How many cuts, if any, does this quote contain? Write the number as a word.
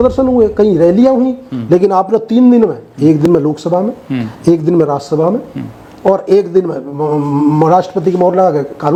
zero